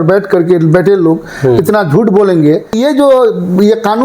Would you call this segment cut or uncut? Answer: cut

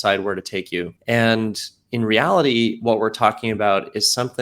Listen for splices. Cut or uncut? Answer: cut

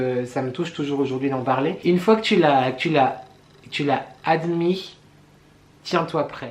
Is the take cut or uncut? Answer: cut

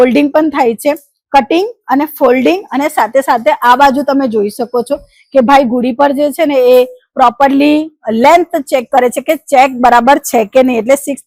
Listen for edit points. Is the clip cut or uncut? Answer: uncut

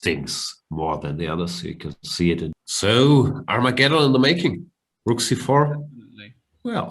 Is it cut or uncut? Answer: cut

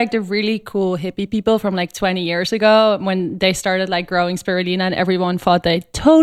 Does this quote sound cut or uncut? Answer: uncut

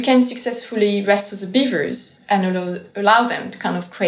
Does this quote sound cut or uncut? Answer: uncut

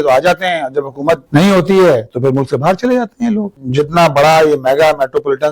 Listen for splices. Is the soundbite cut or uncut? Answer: cut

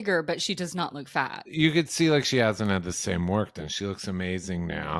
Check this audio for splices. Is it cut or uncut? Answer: cut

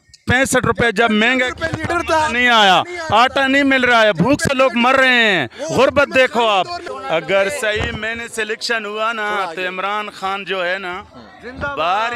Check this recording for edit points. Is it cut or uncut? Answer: cut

